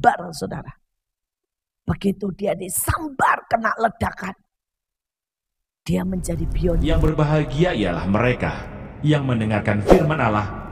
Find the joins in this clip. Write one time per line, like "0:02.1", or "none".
0:06.8